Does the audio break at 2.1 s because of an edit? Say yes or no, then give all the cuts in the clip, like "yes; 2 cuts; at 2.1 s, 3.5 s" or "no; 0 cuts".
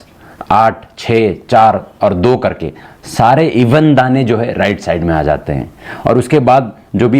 no; 0 cuts